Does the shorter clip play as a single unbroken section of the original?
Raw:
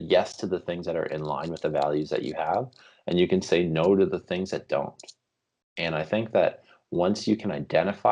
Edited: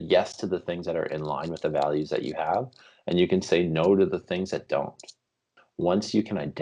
no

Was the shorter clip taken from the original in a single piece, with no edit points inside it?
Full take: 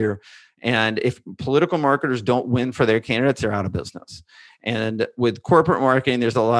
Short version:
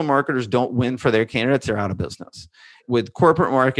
no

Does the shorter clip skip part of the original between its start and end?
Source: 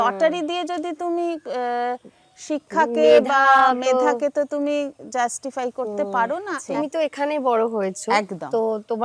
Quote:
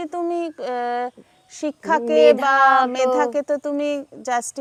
no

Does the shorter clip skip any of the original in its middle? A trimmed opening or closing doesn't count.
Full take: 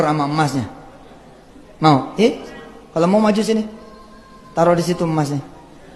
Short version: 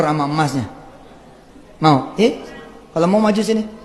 no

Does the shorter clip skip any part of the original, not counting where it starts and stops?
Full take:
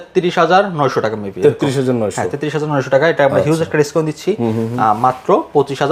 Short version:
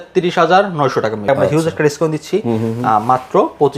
yes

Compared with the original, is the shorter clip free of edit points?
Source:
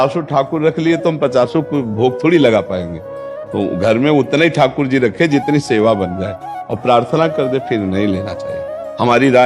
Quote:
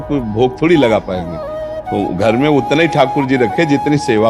yes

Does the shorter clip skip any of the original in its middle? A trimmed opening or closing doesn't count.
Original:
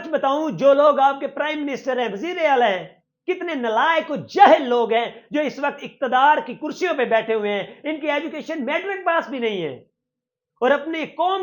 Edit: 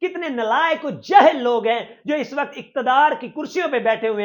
no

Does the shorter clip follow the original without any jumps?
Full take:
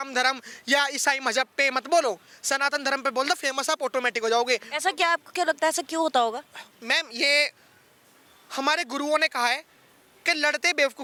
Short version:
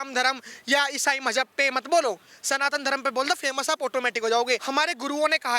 no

